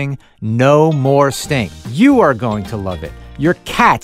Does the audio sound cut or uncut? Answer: cut